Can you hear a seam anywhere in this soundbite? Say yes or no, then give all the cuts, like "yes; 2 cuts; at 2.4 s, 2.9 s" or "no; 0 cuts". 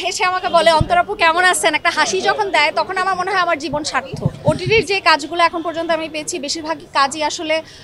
yes; 1 cut; at 4.2 s